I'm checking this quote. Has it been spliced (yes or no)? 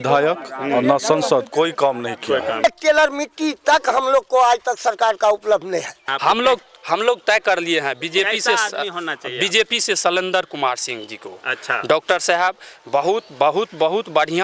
yes